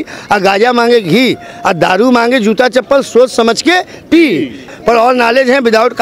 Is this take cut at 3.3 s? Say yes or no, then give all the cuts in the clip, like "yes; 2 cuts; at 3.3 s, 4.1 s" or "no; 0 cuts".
no; 1 cut; at 4.6 s